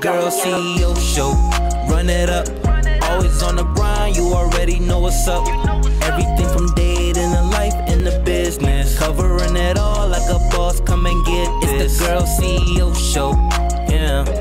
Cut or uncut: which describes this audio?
uncut